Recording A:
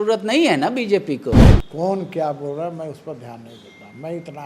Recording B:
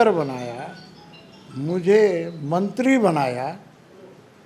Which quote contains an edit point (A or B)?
A